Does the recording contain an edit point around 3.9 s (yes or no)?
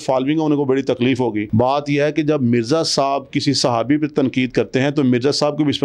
no